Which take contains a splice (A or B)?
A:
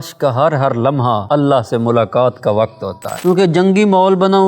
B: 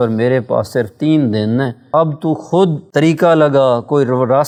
A